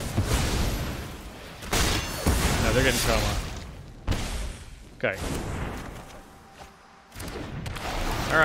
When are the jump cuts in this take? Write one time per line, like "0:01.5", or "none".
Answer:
none